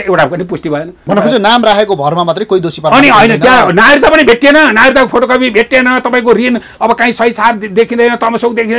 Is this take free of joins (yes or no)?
no